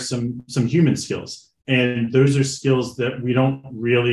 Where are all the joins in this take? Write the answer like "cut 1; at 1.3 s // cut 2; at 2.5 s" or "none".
none